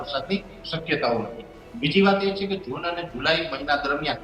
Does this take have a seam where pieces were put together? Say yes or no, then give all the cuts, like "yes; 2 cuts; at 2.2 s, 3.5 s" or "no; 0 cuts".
no; 0 cuts